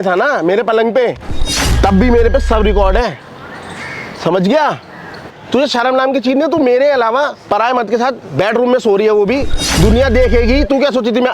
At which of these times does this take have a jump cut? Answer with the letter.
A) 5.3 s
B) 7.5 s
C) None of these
A